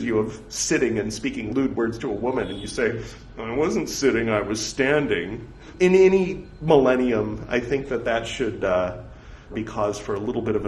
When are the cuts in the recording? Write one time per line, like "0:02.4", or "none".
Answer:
0:01.5
0:05.7
0:09.5